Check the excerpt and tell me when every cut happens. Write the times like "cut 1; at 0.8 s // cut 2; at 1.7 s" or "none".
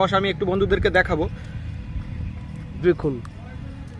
none